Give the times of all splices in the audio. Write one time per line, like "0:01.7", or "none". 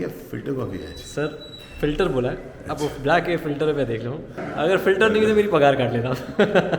0:04.4